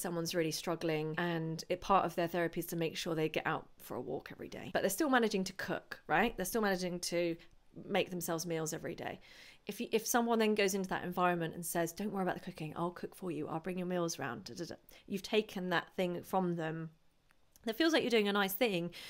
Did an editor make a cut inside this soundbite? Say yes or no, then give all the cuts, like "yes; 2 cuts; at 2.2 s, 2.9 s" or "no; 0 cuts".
yes; 2 cuts; at 1.1 s, 4.6 s